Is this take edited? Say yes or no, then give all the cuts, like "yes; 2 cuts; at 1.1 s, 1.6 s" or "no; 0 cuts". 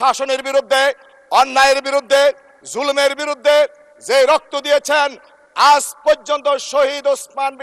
no; 0 cuts